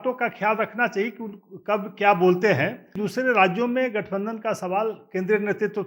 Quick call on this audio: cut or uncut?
cut